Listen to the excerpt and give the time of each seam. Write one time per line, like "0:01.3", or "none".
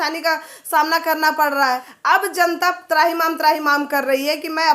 0:01.9

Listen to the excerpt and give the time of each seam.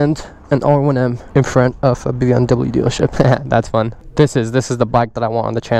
0:03.1
0:04.0

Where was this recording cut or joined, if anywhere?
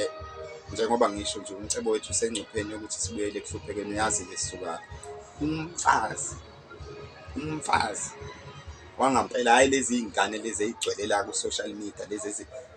none

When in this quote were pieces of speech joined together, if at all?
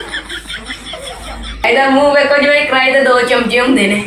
0:01.6

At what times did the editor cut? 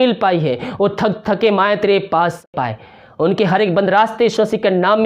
0:02.5

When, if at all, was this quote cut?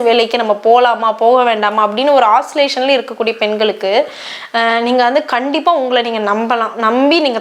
none

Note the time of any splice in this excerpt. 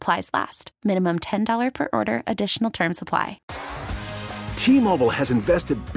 0:03.4

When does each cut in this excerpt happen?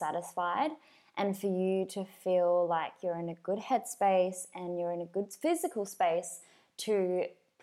none

